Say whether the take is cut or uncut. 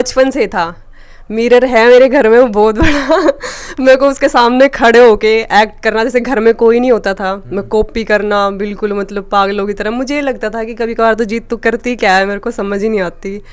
uncut